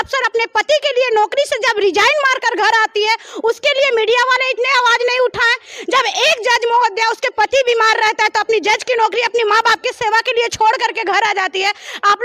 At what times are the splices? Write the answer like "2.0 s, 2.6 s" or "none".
none

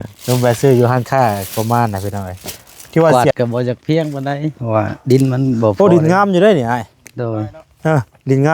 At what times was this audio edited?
3.1 s

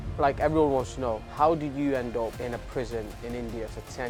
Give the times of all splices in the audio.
1.2 s, 2.4 s

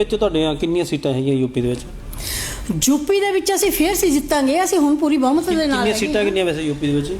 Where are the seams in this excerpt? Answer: none

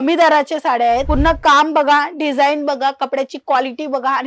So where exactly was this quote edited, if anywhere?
1.1 s

